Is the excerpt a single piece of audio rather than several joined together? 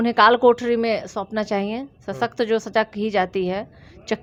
yes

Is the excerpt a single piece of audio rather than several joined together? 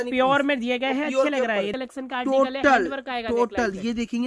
no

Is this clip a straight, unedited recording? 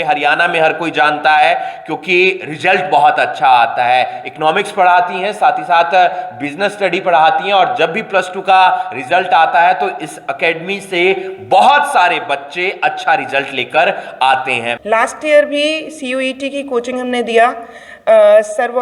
no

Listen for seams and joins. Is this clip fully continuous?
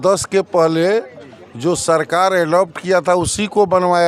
yes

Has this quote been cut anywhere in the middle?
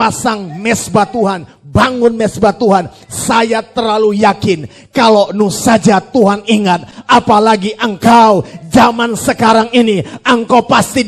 no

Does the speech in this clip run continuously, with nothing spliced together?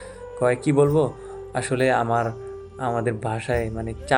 yes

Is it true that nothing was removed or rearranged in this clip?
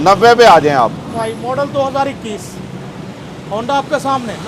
no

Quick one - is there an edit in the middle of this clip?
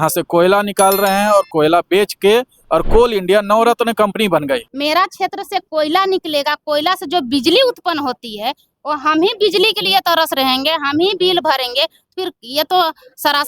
yes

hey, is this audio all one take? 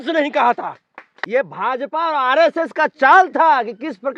no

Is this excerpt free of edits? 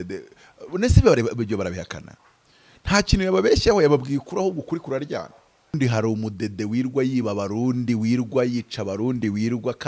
no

